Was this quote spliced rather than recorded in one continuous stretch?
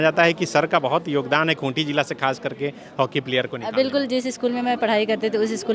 no; 0 cuts

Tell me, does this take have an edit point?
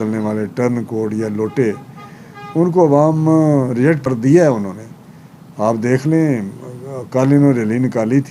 yes; 1 cut; at 4.0 s

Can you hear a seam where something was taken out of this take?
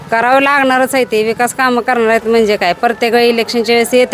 no; 0 cuts

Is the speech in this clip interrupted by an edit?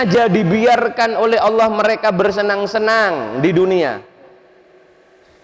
no; 0 cuts

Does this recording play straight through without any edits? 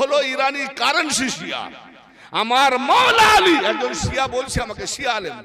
yes; 0 cuts

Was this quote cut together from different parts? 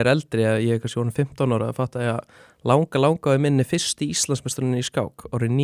no; 0 cuts

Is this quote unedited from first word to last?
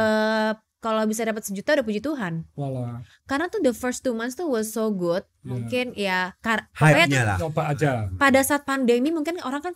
yes; 0 cuts

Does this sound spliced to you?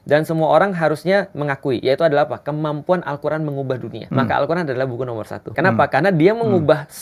yes; 2 cuts; at 4.0 s, 5.5 s

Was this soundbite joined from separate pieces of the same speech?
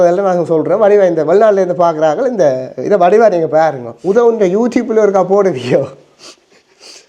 yes; 1 cut; at 3.9 s

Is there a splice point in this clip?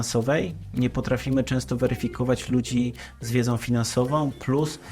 no; 0 cuts

